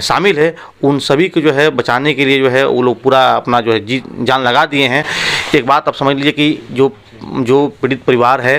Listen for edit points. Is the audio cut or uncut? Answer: uncut